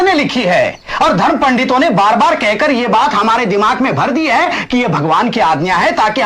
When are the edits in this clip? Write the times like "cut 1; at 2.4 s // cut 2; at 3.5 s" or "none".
none